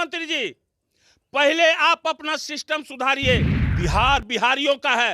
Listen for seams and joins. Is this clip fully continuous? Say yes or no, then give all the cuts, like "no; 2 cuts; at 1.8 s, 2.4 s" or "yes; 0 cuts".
no; 1 cut; at 3.6 s